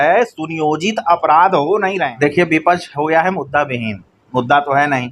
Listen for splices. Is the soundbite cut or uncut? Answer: cut